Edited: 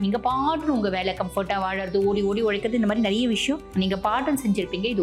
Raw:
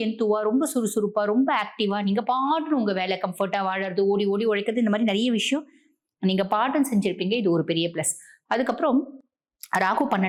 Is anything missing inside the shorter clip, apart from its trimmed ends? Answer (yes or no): yes